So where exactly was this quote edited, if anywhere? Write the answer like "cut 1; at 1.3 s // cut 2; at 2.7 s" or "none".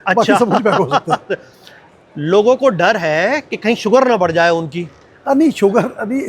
none